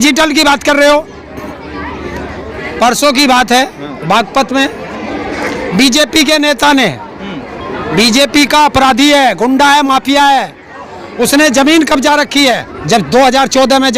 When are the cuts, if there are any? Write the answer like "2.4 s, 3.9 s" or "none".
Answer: 2.5 s, 12.7 s